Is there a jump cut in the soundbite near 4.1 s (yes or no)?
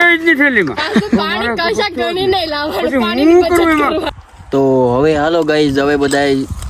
yes